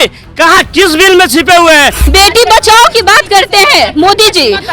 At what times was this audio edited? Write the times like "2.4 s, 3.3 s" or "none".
2.0 s